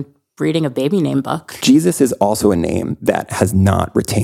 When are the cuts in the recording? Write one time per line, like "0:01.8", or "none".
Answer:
0:01.5